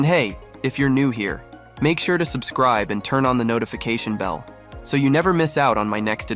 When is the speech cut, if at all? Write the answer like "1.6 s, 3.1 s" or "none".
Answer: none